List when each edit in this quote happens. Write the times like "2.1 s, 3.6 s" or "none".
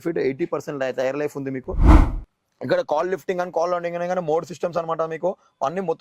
1.9 s